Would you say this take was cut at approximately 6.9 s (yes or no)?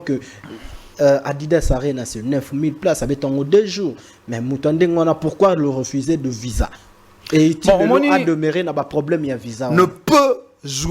no